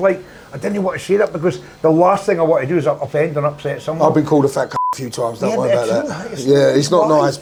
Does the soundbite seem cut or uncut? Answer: uncut